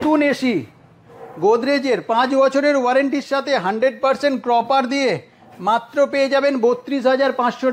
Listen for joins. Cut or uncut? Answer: uncut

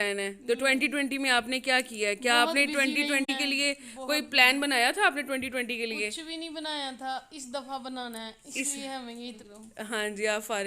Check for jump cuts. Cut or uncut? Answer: cut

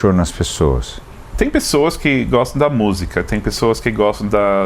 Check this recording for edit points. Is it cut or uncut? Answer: cut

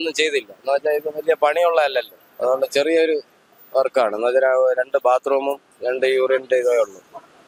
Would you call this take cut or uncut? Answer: uncut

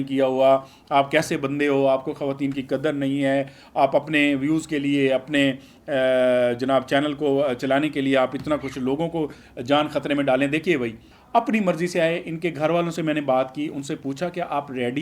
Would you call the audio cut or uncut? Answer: uncut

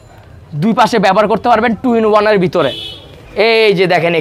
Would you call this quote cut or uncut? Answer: cut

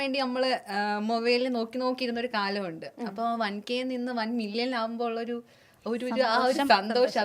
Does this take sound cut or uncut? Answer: uncut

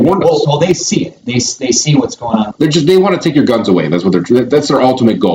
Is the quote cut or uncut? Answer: cut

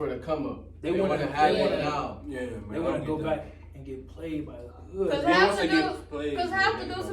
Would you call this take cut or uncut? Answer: uncut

